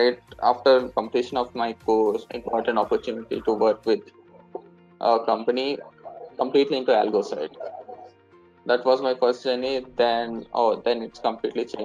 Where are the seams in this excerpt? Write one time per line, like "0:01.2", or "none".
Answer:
0:00.9
0:02.3